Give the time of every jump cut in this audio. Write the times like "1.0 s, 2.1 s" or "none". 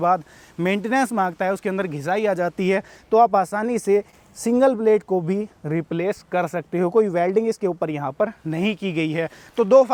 none